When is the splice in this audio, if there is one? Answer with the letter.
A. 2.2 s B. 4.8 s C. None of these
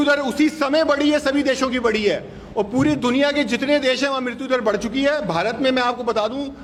C